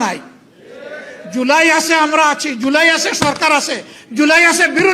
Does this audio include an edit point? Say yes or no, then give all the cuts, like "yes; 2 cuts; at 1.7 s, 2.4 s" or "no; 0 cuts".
no; 0 cuts